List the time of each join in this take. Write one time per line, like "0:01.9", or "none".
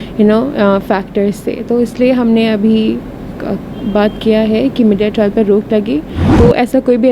0:06.2